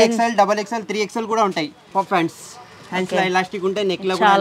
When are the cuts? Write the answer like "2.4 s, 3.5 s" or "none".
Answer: 1.8 s